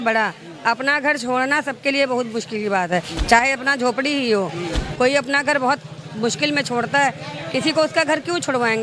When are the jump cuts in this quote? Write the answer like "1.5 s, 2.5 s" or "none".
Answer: none